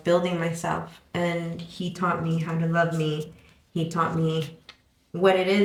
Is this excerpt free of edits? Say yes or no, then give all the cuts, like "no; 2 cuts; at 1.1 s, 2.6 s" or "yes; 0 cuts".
yes; 0 cuts